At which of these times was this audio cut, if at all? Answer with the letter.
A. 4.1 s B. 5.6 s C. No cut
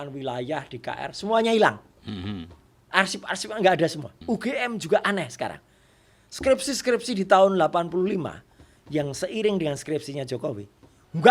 A